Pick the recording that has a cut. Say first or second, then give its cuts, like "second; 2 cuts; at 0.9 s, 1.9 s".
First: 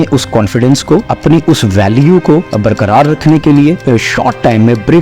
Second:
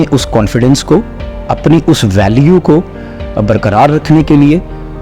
first; 3 cuts; at 1.1 s, 2.5 s, 3.8 s